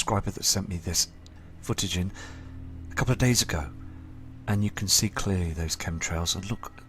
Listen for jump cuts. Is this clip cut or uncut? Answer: cut